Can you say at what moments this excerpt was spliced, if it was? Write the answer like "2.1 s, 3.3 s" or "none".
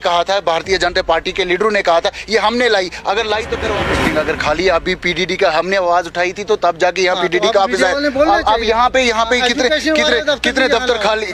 3.7 s